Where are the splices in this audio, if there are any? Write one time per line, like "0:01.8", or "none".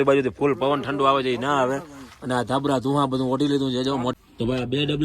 0:04.1